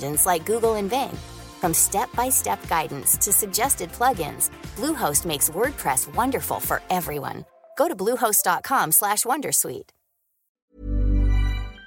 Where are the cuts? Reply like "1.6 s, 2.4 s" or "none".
10.6 s